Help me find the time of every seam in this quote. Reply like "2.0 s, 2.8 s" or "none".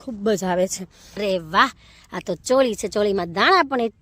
1.2 s